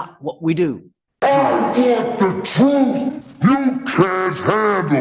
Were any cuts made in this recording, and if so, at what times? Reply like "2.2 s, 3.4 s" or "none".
1.1 s